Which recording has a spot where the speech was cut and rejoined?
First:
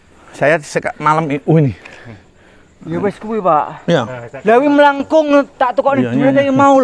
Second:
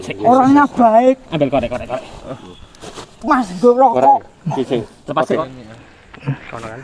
second; 1 cut; at 5.4 s

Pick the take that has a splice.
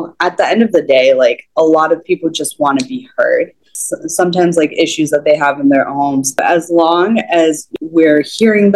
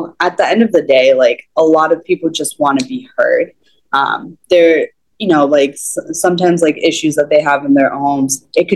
first; 3 cuts; at 3.8 s, 6.4 s, 7.7 s

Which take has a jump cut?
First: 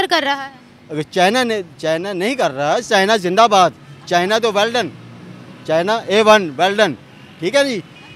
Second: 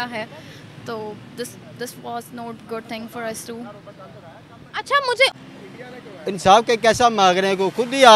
second; 1 cut; at 5.3 s

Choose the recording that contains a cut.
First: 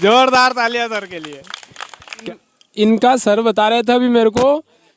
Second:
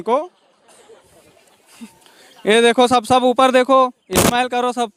first; 1 cut; at 2.2 s

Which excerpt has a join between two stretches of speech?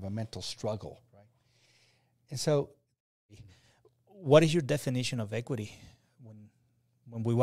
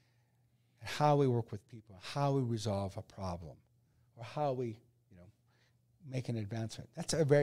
first; 1 cut; at 3.2 s

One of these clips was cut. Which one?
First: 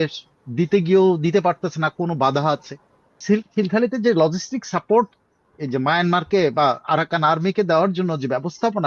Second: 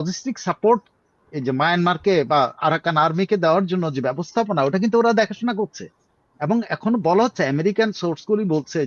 first; 1 cut; at 3.2 s

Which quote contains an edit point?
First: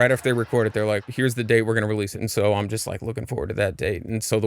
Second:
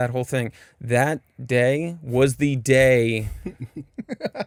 first; 2 cuts; at 1.1 s, 2.2 s

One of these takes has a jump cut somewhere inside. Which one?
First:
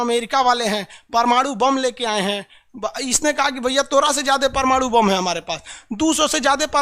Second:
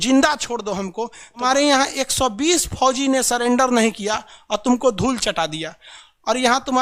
second; 1 cut; at 1.4 s

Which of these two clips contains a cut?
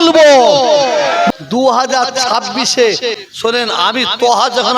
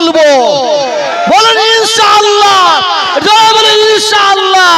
first; 2 cuts; at 1.3 s, 3.3 s

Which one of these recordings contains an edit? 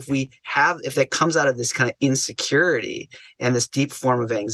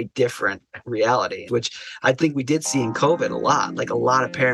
second; 1 cut; at 1.4 s

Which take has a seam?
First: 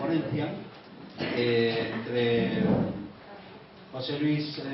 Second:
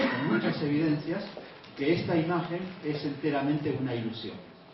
first; 1 cut; at 1.6 s

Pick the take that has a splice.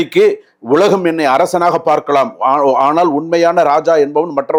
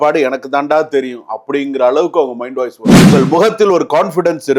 second; 1 cut; at 3.1 s

